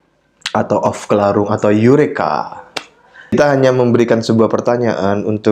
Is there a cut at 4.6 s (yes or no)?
no